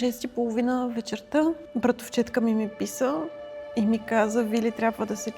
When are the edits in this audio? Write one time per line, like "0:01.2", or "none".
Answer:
0:01.6